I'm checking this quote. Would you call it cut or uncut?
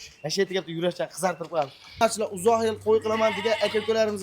cut